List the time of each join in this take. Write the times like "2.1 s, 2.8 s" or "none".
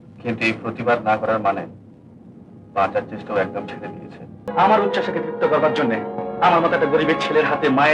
4.5 s